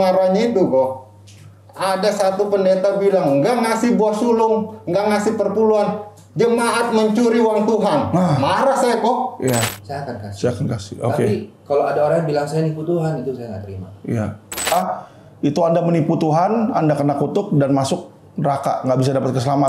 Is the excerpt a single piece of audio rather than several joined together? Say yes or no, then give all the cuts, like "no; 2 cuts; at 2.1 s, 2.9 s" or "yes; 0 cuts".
no; 2 cuts; at 9.8 s, 14.7 s